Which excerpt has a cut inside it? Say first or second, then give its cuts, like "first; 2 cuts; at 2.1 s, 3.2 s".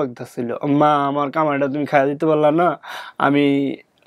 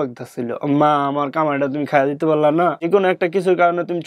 second; 1 cut; at 2.9 s